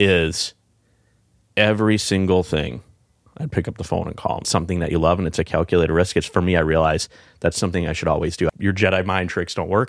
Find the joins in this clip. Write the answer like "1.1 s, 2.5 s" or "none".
4.5 s, 8.5 s